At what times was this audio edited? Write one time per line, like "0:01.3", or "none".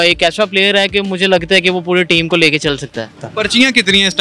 0:03.2